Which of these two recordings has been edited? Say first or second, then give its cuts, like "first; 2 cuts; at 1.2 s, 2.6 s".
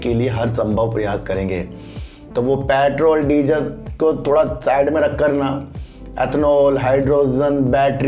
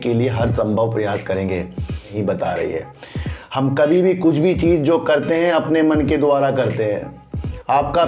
second; 1 cut; at 2.1 s